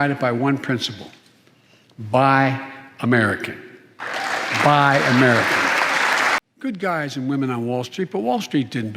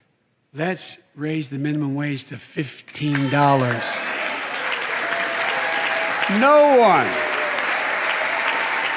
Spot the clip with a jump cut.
first; 1 cut; at 6.4 s

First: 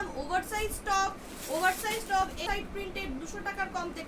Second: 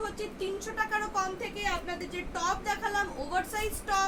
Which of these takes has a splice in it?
first; 1 cut; at 2.4 s

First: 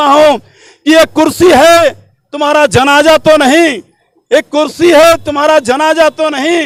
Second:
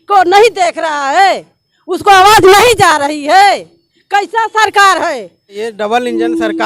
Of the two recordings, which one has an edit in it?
second; 1 cut; at 5.6 s

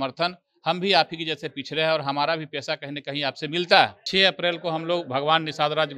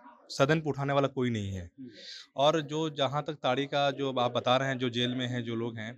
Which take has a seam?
first; 1 cut; at 4.0 s

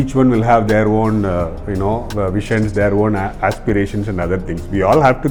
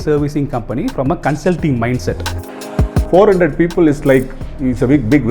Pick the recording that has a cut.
second; 1 cut; at 2.6 s

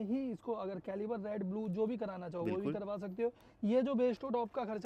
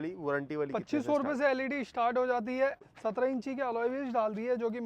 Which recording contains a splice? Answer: second; 1 cut; at 2.9 s

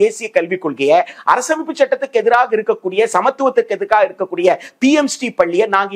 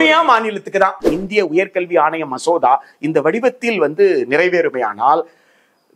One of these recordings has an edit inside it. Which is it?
second; 1 cut; at 1.1 s

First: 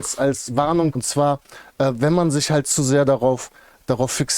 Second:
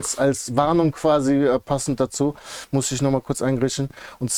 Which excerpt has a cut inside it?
first; 1 cut; at 1.0 s

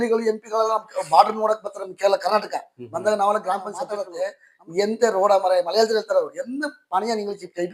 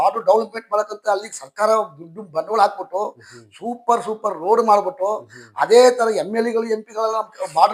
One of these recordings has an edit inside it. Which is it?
first; 1 cut; at 4.0 s

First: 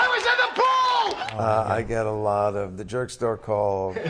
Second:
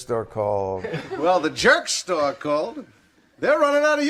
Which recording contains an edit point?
first; 1 cut; at 1.3 s

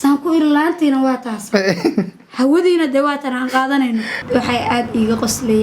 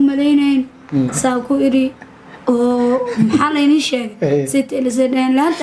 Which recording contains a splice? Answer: first; 1 cut; at 4.2 s

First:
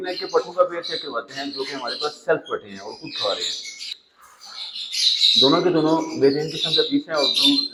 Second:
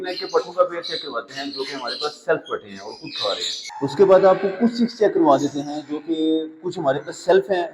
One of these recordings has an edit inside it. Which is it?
second; 1 cut; at 3.7 s

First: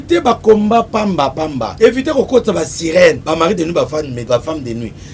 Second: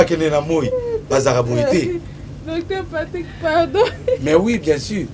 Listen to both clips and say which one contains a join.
first; 3 cuts; at 1.6 s, 3.2 s, 4.2 s

